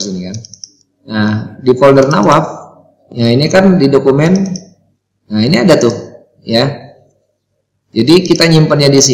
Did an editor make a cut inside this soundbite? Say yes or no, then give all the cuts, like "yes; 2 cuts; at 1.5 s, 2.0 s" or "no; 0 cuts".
no; 0 cuts